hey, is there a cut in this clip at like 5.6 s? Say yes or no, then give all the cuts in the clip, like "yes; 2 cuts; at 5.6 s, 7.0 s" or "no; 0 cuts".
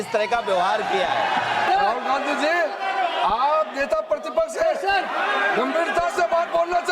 no; 1 cut; at 1.7 s